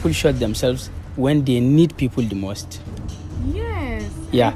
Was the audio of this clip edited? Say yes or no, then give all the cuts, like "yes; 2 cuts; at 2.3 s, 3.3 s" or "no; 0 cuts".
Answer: no; 0 cuts